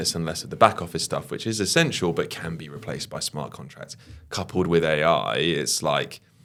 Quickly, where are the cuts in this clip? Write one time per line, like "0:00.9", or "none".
none